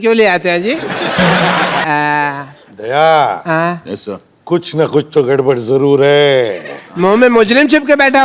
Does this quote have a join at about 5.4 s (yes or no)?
no